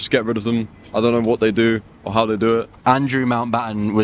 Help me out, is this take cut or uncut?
cut